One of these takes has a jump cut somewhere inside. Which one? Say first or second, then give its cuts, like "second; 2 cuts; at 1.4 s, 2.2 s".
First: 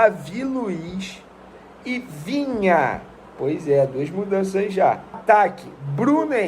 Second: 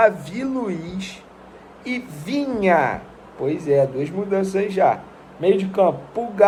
first; 1 cut; at 5.2 s